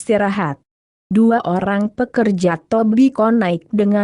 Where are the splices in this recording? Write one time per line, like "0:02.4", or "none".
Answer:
0:01.3